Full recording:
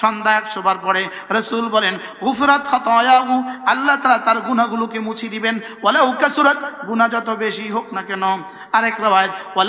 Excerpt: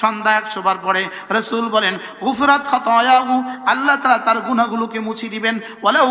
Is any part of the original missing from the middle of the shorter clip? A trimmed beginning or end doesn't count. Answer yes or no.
no